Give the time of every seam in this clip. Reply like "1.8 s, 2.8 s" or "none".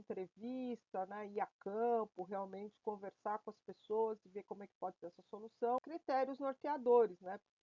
5.9 s

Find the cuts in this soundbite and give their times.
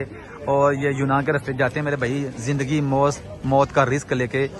none

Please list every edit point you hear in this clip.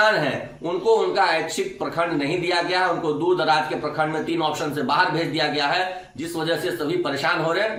none

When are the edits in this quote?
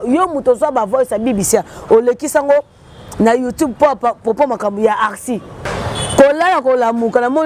5.7 s

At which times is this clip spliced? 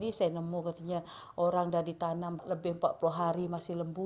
2.4 s

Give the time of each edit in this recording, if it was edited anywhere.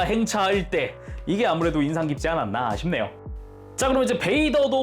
1.1 s, 3.2 s

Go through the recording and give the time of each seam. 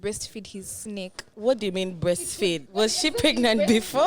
1.3 s, 2.6 s

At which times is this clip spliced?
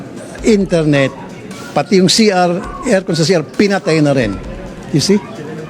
1.3 s, 4.4 s

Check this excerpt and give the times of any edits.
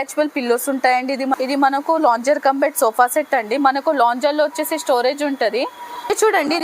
1.5 s, 5.8 s

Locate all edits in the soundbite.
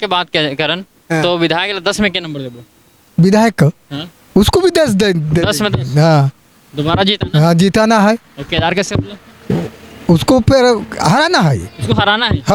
none

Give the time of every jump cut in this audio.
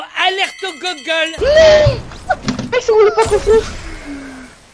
1.3 s

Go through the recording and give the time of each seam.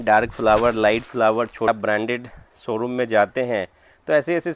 1.7 s

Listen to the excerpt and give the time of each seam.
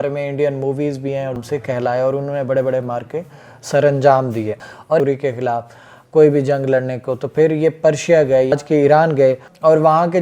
1.4 s, 5.0 s, 8.5 s

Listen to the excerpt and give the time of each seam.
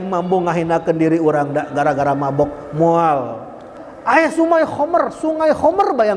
3.7 s

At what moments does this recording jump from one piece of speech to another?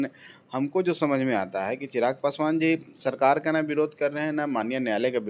none

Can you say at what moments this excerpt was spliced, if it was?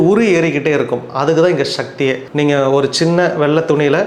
2.2 s

